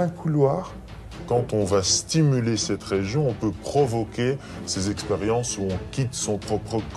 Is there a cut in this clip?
yes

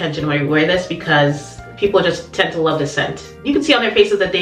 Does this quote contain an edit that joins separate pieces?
yes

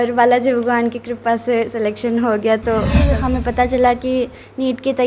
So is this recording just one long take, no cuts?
no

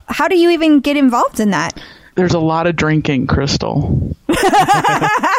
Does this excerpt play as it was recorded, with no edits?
yes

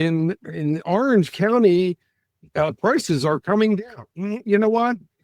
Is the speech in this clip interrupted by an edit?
no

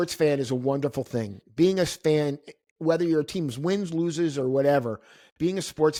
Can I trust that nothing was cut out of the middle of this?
yes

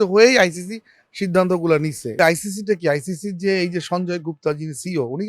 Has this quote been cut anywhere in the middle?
yes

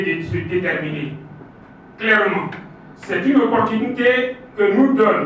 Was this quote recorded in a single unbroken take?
no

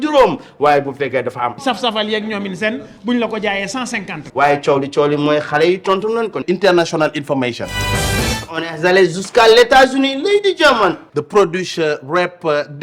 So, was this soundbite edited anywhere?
yes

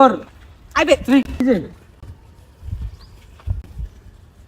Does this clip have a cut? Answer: yes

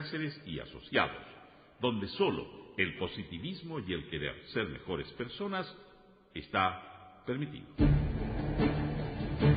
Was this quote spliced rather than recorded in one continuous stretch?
yes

